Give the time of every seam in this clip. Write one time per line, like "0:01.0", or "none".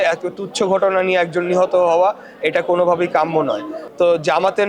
0:03.8